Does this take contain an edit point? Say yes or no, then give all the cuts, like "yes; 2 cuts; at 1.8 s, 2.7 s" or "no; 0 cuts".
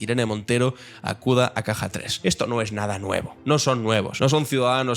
yes; 3 cuts; at 2.0 s, 3.3 s, 4.1 s